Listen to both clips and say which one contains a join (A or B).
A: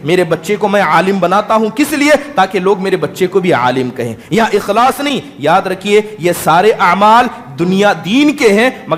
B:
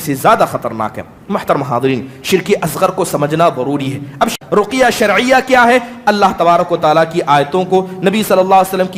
B